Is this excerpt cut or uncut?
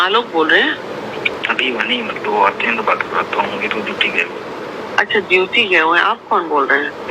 cut